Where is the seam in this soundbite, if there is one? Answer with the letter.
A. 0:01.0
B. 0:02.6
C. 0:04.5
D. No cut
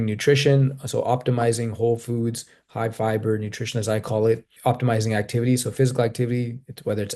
C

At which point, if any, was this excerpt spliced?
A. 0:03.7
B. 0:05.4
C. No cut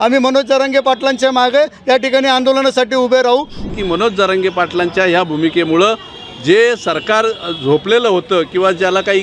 A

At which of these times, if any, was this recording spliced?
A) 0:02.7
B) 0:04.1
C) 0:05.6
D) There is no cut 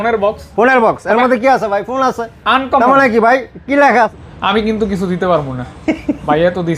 B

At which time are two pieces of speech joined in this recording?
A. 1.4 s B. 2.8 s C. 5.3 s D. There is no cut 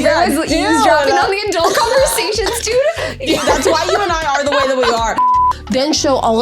C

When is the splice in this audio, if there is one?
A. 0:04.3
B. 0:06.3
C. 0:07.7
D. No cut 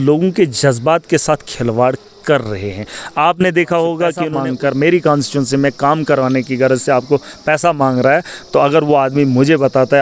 A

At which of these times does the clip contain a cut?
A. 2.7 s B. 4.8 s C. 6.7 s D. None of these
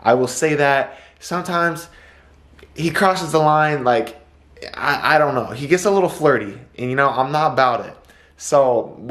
D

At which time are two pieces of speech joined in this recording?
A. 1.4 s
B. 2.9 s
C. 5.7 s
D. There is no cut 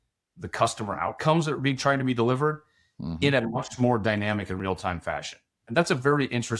C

